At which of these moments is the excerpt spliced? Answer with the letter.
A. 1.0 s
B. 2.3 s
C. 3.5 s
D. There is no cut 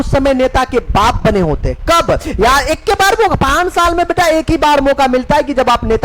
D